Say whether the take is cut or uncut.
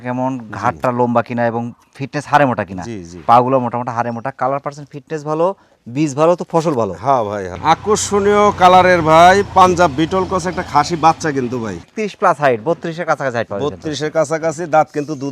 cut